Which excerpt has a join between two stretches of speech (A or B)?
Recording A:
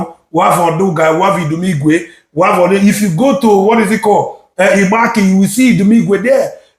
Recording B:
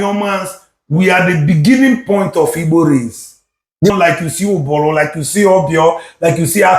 B